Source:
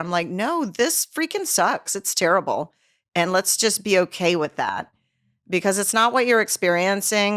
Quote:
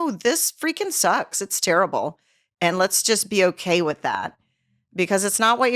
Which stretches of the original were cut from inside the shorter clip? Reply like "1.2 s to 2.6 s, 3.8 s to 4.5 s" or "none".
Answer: none